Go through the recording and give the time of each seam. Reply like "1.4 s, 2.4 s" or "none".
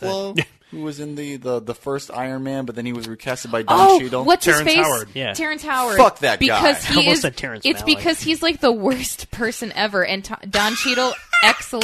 none